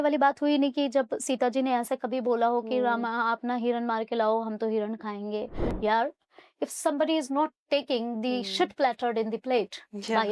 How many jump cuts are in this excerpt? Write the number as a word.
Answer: one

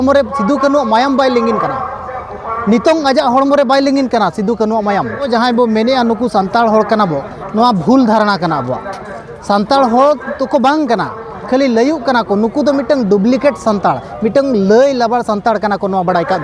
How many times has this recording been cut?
one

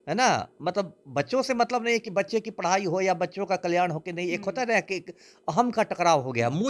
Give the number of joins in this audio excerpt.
zero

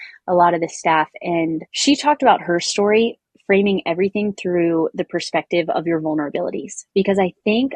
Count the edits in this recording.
one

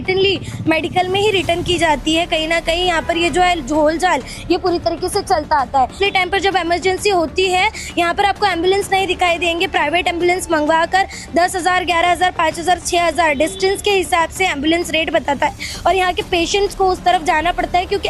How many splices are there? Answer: one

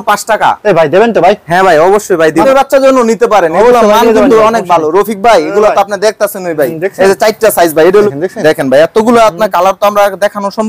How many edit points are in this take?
two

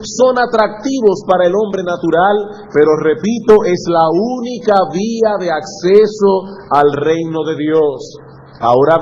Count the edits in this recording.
zero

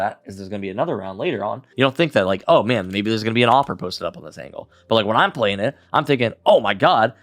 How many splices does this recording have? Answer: one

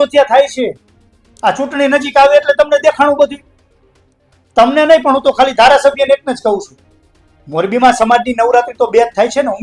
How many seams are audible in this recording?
zero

